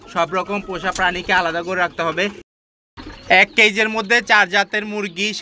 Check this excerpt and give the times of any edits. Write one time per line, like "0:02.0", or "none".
0:02.6

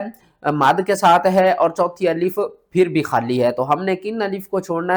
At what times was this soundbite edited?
none

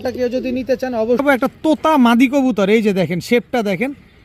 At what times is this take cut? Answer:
0:01.2

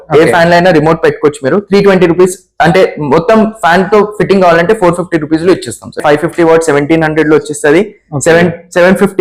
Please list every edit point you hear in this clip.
0:06.0

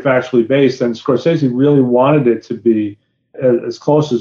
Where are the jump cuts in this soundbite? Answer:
0:03.3

